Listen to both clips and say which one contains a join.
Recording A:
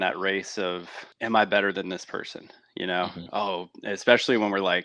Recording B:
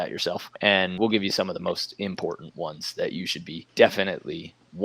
B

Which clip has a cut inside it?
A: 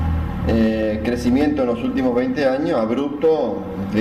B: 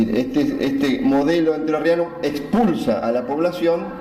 A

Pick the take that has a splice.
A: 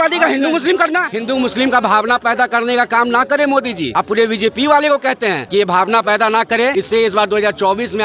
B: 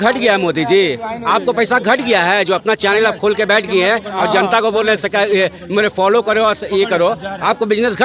A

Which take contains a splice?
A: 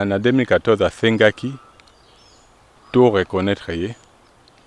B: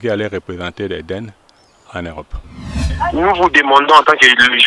B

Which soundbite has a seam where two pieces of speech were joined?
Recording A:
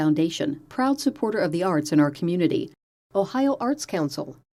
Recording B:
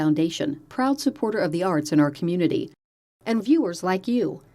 B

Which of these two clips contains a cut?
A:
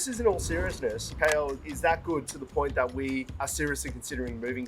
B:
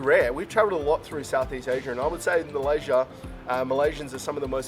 A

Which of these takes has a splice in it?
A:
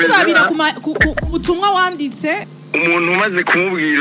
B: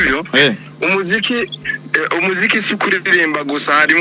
A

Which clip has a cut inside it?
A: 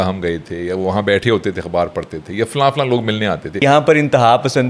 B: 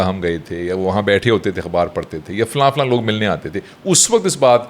A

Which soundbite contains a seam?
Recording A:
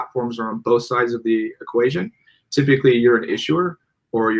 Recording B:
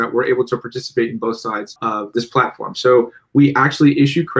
B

